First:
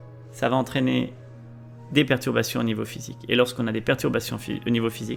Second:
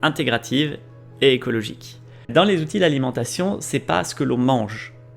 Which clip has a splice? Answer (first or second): second